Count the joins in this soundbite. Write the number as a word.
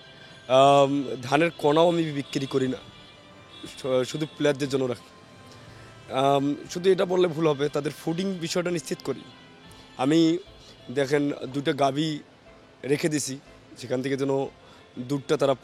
zero